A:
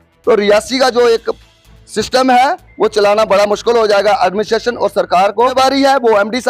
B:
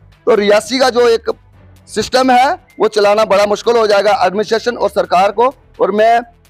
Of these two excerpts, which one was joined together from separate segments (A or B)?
A